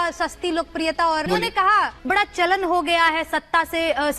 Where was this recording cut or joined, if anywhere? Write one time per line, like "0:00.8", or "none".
0:01.3